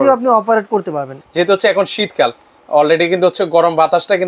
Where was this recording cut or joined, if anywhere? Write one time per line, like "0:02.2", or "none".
0:01.2